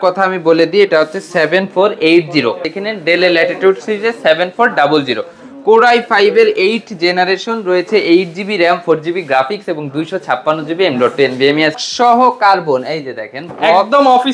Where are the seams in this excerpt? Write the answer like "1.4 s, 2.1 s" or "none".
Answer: 2.7 s, 11.8 s

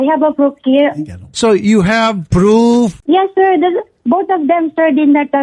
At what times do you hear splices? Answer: 3.0 s

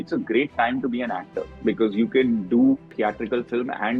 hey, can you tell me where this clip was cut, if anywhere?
2.9 s

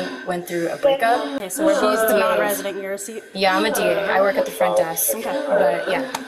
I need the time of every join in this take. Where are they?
none

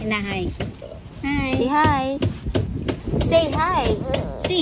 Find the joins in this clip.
none

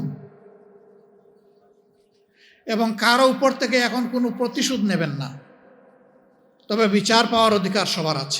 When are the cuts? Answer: none

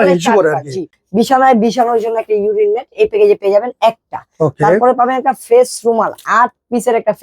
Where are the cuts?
1.0 s

